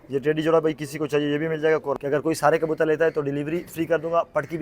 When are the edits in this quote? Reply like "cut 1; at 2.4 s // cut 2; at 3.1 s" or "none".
cut 1; at 1.9 s